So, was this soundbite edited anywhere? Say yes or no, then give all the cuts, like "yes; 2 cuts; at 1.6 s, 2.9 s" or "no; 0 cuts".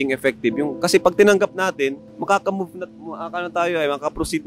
yes; 1 cut; at 2.1 s